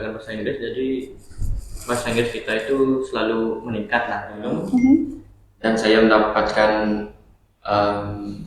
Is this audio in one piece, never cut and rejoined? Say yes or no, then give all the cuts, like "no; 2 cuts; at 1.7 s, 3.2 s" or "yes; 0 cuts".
no; 1 cut; at 4.7 s